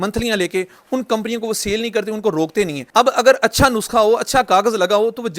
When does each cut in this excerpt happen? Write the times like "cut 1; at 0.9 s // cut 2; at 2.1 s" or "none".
cut 1; at 2.8 s

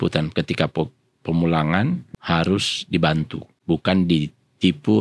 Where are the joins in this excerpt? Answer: cut 1; at 2.1 s // cut 2; at 3.5 s

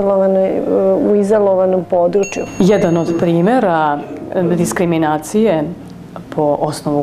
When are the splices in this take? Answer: cut 1; at 2.4 s

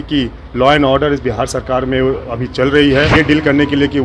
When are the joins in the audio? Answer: cut 1; at 3.1 s

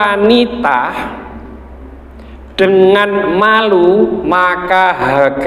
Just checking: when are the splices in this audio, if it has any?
cut 1; at 4.2 s

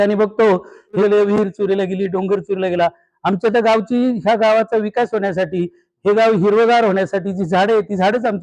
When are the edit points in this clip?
cut 1; at 1.0 s

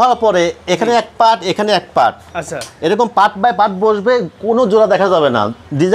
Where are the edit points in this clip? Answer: none

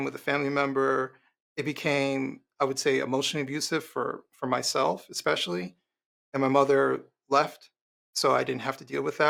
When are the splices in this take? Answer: none

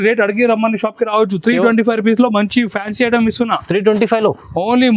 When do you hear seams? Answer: none

